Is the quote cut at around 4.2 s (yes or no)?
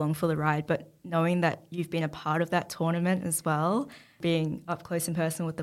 yes